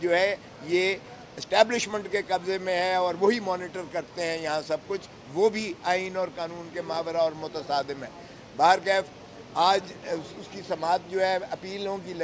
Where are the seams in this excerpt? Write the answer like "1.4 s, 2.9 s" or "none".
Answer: none